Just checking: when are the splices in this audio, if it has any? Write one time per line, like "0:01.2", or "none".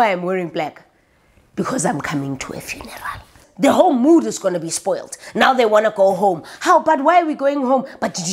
0:03.4